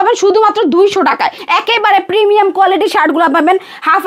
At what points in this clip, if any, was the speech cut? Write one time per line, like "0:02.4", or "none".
0:01.4